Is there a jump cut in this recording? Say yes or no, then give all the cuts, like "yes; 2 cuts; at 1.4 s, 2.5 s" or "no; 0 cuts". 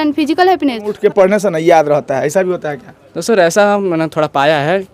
yes; 1 cut; at 0.9 s